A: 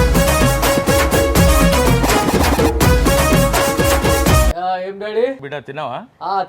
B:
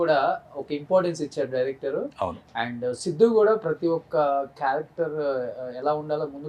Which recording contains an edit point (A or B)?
A